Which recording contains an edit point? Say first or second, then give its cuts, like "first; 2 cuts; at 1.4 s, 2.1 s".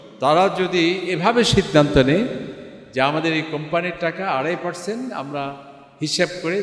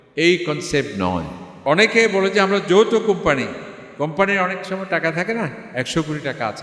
second; 1 cut; at 1.4 s